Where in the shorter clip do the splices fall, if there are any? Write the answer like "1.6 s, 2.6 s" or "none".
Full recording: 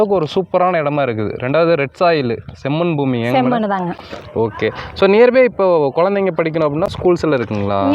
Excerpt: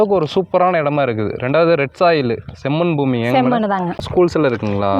4.1 s